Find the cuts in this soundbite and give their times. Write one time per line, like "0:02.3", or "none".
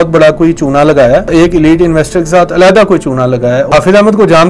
0:01.3
0:03.7